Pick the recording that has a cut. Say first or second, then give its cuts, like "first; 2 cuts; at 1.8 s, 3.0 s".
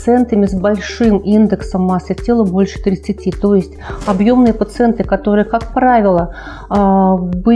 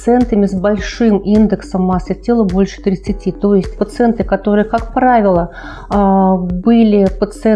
second; 1 cut; at 3.8 s